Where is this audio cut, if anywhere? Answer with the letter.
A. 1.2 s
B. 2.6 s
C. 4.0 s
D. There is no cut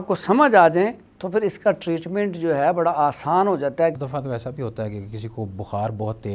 C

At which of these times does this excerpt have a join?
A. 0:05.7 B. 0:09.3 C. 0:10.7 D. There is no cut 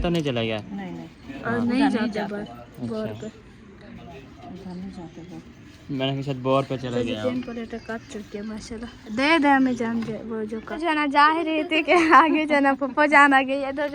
C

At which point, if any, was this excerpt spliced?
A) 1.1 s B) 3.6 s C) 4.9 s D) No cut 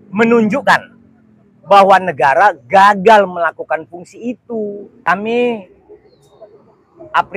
C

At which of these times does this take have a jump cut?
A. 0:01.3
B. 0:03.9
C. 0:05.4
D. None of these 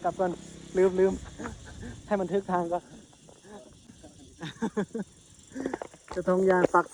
D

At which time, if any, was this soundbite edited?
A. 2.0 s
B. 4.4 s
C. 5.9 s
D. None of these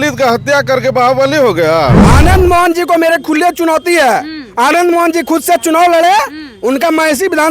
A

